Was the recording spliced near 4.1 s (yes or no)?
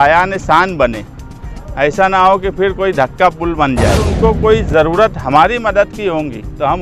yes